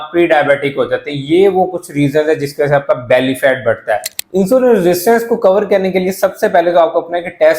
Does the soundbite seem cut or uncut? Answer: cut